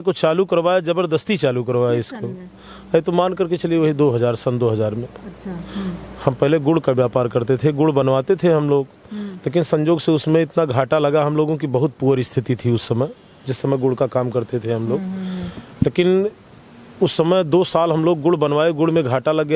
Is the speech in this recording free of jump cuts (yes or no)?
yes